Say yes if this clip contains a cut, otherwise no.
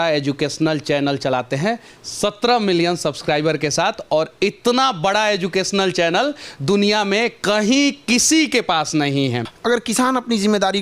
yes